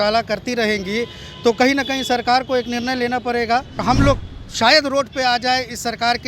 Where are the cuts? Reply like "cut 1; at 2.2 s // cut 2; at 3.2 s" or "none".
cut 1; at 3.8 s